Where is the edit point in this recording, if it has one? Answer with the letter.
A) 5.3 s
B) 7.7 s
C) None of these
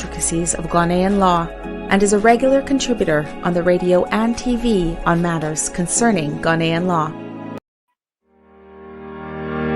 B